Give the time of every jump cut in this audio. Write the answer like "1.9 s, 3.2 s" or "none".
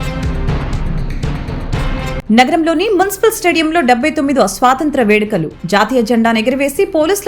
none